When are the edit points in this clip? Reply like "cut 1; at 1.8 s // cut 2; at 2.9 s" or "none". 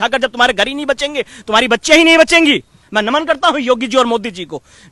cut 1; at 2.8 s